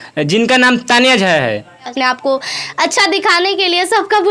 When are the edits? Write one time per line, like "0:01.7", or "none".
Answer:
0:01.9